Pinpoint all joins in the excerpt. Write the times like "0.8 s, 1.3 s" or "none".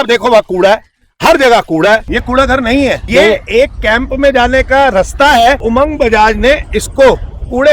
2.1 s, 3.0 s, 5.6 s